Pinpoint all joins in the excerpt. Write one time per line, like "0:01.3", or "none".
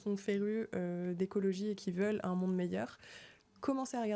none